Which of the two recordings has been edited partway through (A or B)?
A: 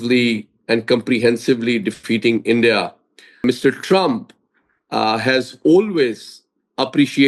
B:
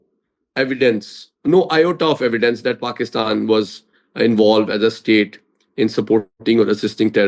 A